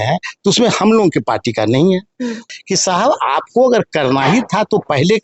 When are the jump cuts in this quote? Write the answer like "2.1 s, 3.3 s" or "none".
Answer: 2.5 s

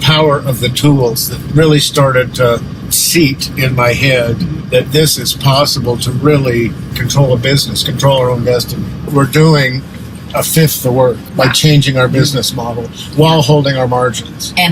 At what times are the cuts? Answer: 4.6 s, 6.9 s, 9.1 s, 11.2 s

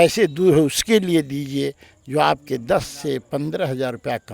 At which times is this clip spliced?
none

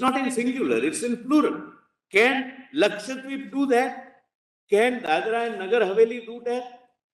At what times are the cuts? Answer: none

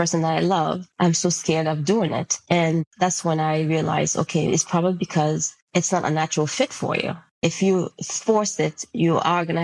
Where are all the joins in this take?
0.9 s, 2.6 s, 5.5 s, 7.3 s

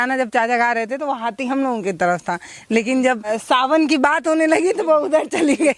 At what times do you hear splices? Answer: 3.4 s

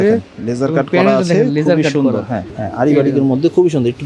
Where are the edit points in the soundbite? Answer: 2.6 s

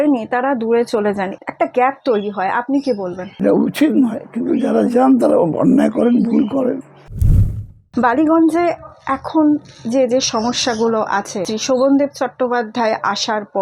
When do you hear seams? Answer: 1.3 s, 3.4 s, 7.4 s, 11.4 s

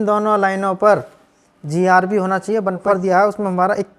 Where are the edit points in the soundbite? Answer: 2.8 s

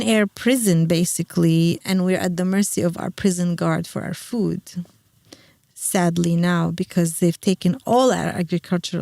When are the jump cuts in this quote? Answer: 1.8 s

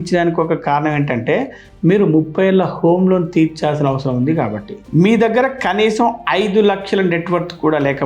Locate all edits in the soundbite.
4.8 s

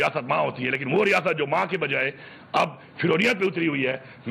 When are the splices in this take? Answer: none

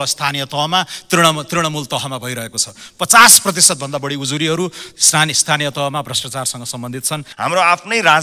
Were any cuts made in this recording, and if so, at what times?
7.3 s

